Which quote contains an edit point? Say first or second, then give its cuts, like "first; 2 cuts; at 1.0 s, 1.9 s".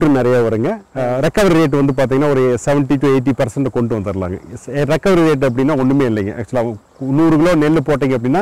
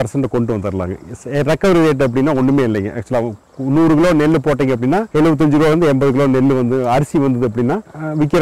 first; 1 cut; at 0.9 s